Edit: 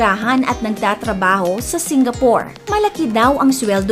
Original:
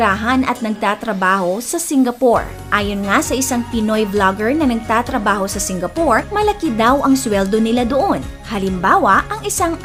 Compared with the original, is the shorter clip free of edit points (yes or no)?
no